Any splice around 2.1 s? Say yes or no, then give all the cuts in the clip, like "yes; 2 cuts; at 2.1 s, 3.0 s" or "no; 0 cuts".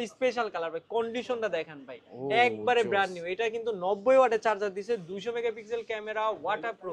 no; 0 cuts